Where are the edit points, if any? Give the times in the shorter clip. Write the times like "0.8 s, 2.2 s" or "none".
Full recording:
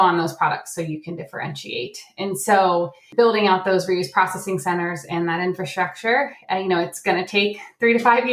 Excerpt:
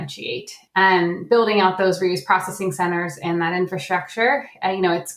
1.0 s